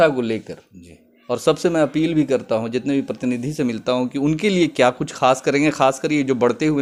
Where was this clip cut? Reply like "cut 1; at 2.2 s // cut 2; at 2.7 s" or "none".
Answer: none

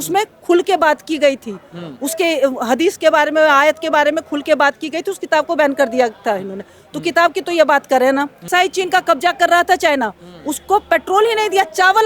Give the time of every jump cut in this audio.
cut 1; at 8.5 s

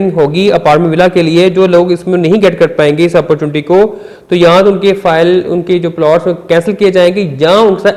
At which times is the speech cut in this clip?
none

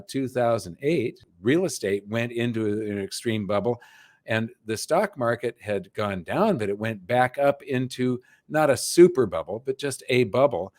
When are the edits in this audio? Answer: cut 1; at 1.2 s

